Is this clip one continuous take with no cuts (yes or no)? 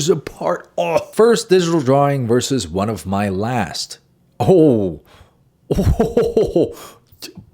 no